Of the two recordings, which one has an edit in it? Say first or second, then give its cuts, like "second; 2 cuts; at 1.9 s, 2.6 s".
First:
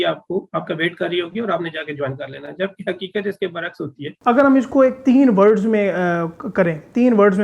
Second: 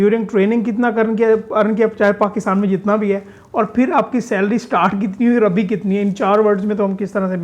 first; 1 cut; at 4.1 s